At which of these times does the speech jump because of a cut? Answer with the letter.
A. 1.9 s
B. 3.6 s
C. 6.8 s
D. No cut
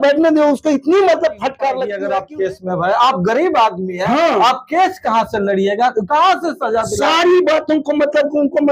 A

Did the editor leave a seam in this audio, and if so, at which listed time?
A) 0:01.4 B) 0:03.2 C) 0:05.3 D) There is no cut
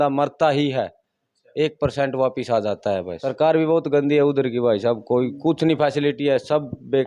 B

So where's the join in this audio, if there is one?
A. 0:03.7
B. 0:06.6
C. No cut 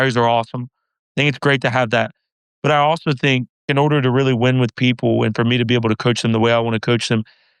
A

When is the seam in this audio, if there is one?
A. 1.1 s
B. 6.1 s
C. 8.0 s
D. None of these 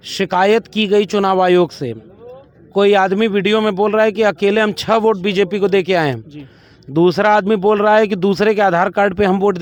D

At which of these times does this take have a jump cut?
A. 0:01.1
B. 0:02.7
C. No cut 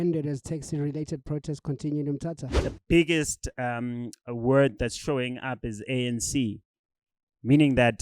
B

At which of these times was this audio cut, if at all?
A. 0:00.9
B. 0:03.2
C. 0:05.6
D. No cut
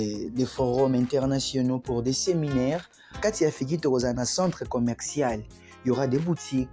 B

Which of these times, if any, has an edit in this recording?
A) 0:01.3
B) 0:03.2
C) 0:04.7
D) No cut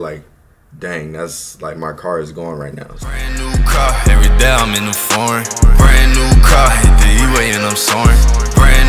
B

